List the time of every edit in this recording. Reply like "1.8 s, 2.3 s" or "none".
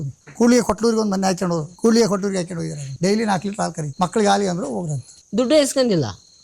1.7 s, 2.8 s, 3.8 s

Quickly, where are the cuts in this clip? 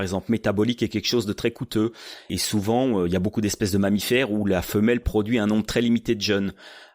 2.3 s

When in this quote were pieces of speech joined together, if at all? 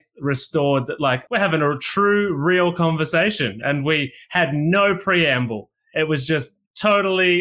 1.2 s

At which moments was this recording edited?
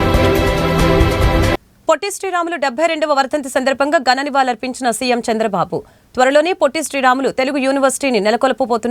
1.3 s

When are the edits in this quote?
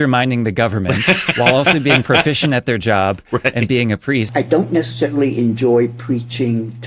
4.3 s

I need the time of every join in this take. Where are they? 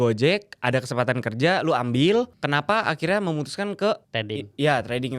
2.4 s, 4.1 s

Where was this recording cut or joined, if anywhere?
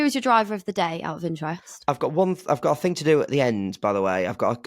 none

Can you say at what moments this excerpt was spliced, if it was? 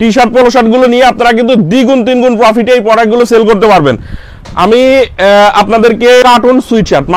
6.2 s

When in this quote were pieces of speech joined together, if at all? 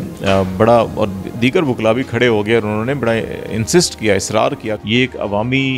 4.8 s

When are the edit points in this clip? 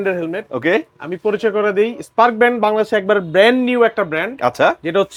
none

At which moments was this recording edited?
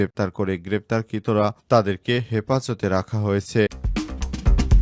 3.8 s

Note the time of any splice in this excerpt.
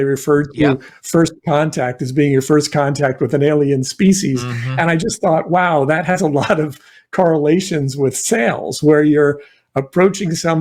none

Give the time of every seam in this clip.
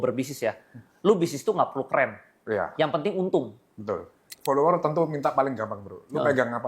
4.3 s

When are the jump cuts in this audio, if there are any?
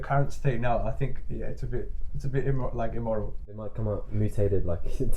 3.5 s

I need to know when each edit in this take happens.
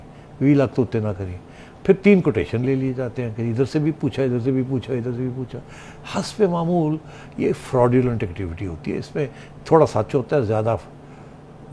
none

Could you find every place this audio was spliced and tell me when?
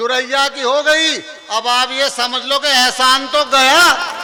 none

